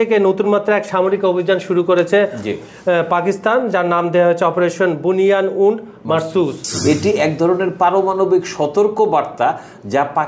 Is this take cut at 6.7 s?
yes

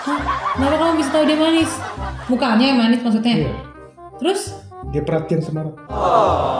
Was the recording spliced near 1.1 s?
no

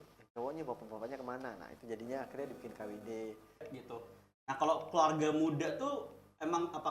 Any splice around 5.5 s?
no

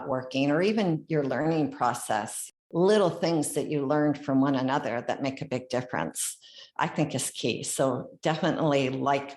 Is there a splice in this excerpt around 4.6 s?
no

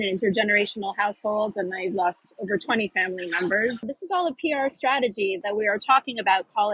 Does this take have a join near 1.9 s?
no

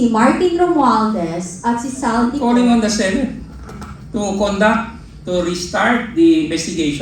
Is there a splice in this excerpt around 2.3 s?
yes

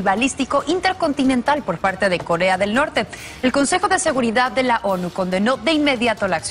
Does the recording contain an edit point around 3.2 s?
no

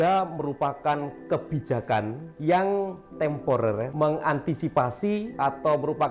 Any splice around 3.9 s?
yes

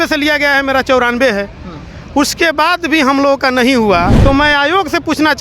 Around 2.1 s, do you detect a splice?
no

